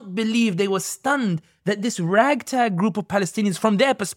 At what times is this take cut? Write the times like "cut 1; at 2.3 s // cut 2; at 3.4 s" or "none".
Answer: none